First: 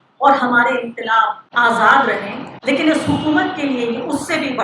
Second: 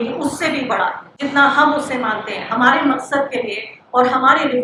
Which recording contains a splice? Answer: first; 1 cut; at 1.4 s

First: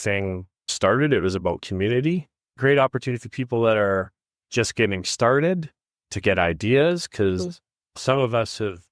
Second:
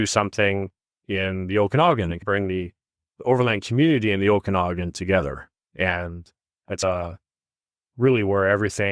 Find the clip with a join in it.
first; 1 cut; at 2.4 s

